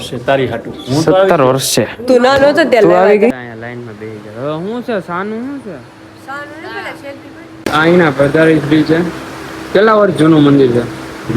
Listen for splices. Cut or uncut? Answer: cut